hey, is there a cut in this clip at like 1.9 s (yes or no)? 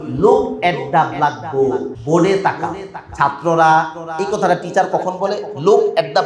yes